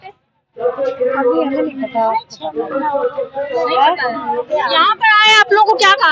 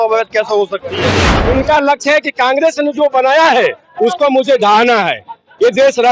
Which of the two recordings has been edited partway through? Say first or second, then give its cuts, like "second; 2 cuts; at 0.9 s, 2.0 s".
second; 1 cut; at 1.3 s